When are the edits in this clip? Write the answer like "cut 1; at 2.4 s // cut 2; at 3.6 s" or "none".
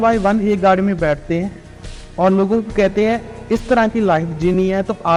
none